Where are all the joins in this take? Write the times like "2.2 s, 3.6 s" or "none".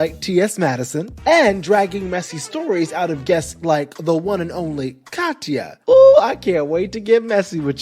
1.0 s, 5.7 s